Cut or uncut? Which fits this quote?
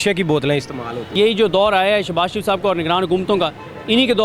cut